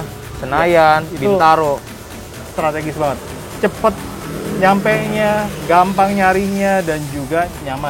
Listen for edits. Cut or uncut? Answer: uncut